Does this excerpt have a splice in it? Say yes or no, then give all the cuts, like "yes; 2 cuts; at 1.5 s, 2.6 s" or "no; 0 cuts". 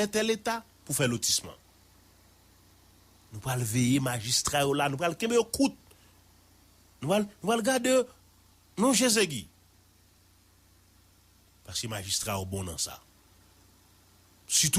no; 0 cuts